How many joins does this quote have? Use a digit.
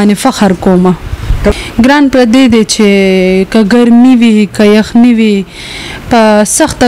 1